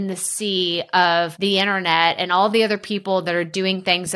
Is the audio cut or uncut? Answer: cut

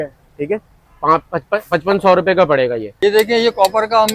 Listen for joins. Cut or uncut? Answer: cut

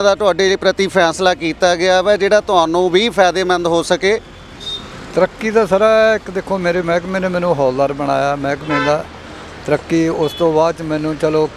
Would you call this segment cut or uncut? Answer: uncut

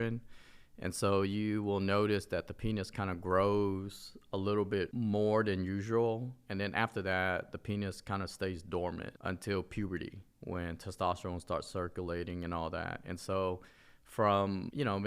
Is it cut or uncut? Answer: uncut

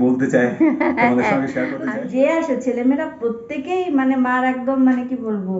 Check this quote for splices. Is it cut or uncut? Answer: cut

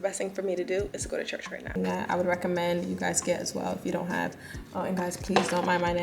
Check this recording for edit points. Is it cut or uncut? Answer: cut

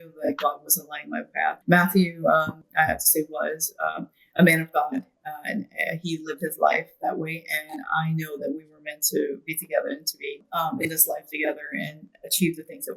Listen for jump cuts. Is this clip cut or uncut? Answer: cut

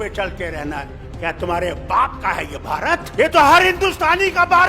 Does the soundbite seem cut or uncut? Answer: cut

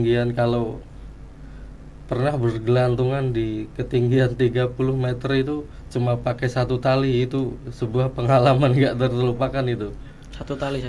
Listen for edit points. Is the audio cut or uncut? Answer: uncut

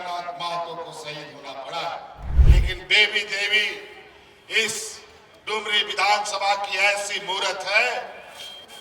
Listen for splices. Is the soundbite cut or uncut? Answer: cut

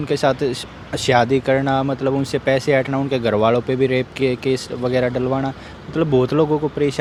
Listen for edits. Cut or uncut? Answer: uncut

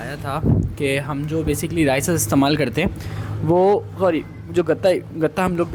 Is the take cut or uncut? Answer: uncut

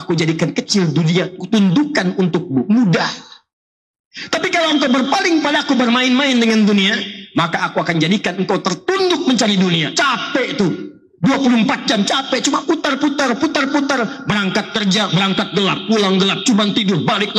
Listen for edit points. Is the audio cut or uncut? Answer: uncut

